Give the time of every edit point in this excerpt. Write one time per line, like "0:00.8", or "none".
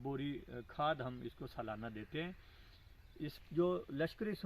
0:03.2